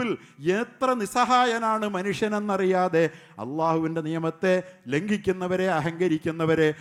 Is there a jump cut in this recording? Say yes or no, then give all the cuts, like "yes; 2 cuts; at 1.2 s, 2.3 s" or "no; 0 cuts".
no; 0 cuts